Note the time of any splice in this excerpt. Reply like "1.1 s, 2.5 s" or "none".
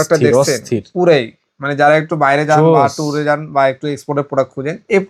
none